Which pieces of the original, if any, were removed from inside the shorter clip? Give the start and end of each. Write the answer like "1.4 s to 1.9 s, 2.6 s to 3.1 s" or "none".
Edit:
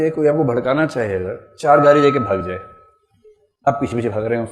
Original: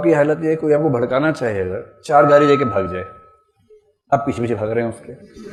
none